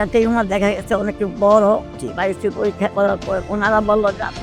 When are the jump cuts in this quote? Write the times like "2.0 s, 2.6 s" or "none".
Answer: 1.9 s, 3.4 s